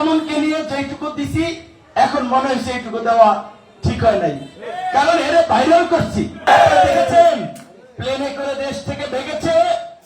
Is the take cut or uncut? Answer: cut